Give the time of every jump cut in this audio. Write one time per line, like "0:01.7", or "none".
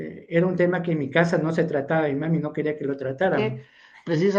0:03.4